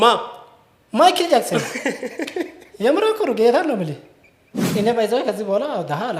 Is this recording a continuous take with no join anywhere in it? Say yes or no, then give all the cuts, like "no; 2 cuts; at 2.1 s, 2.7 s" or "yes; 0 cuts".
no; 1 cut; at 4.6 s